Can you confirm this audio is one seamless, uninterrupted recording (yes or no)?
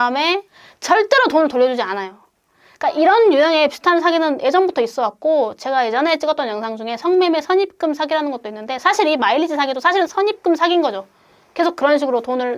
yes